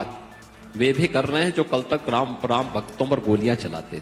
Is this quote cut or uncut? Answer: uncut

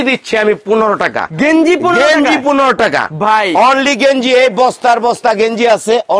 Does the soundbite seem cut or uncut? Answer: uncut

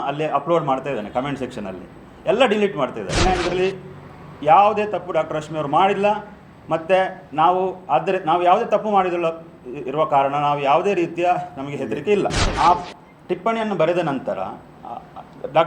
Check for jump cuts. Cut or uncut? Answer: cut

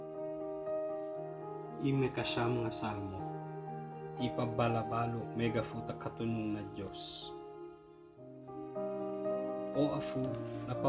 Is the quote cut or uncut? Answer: uncut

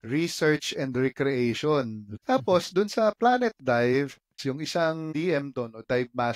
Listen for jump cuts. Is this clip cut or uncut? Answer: cut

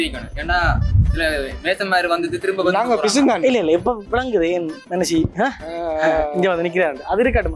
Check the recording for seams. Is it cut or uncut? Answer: uncut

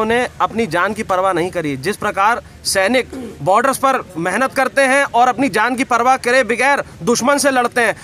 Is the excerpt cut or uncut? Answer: uncut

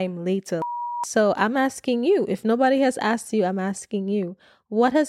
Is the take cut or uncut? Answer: cut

